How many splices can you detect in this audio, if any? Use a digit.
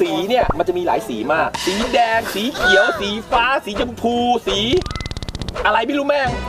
1